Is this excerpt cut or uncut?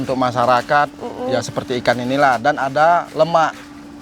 uncut